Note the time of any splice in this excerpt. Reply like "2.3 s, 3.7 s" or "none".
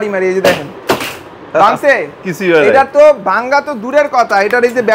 none